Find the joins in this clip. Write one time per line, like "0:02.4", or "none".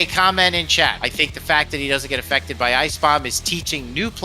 0:01.0